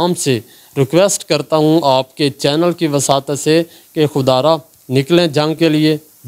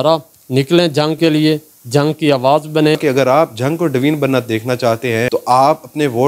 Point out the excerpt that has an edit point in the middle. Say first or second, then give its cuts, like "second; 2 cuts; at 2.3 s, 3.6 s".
second; 2 cuts; at 3.0 s, 5.3 s